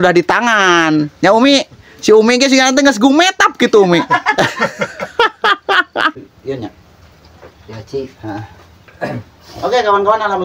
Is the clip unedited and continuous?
no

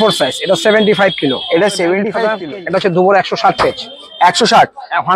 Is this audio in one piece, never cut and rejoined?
no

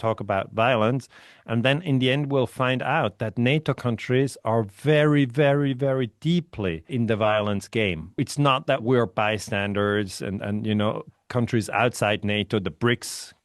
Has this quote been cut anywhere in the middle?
yes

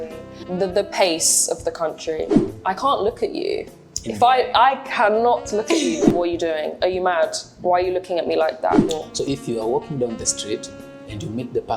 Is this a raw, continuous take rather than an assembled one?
no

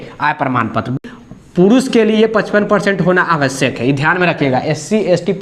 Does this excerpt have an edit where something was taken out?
yes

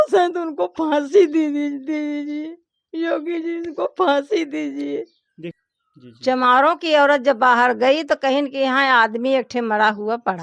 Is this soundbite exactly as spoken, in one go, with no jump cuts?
no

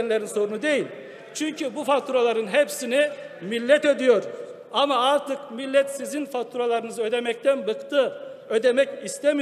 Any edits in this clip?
no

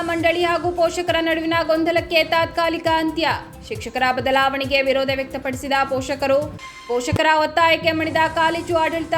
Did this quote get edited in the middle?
no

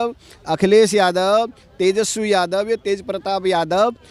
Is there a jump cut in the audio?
no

